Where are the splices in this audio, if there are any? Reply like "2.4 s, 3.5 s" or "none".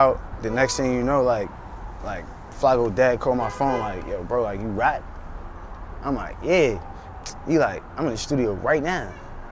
none